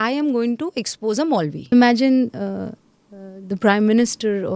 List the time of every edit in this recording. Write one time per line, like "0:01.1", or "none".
0:01.7